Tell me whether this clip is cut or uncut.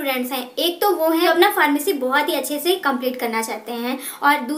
cut